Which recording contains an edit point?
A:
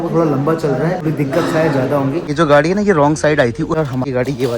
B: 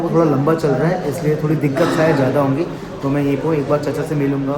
A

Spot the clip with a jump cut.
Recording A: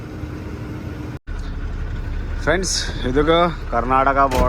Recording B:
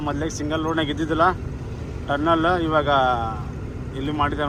A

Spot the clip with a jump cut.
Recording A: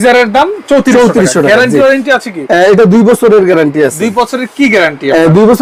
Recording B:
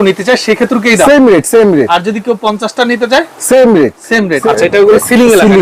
B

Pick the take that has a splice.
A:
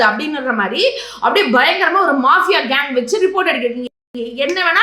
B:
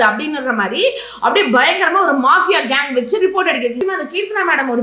B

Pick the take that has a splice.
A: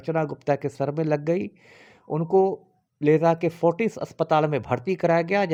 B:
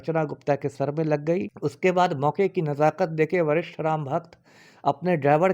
B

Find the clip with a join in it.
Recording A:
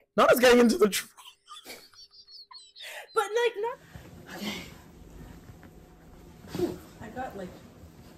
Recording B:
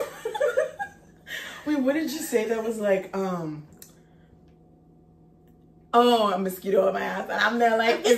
A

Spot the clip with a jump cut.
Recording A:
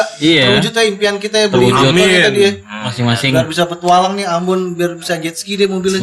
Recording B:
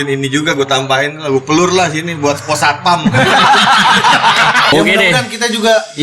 B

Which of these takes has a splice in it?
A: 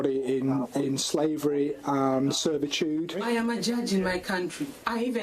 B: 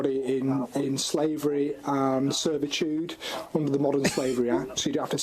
A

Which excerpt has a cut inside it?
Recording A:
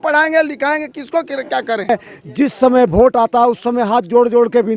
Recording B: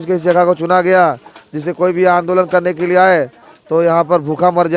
A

